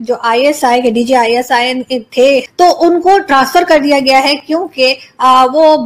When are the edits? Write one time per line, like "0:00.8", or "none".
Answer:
0:02.4